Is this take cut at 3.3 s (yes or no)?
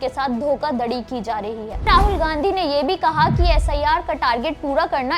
no